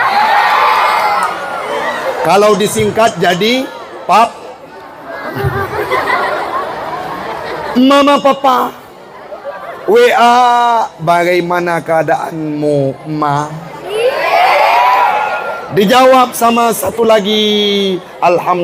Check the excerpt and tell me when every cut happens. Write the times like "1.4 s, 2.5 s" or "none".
none